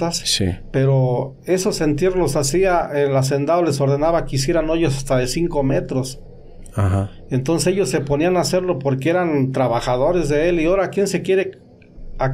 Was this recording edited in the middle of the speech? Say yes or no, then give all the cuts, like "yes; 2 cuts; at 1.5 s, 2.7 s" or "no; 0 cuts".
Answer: no; 0 cuts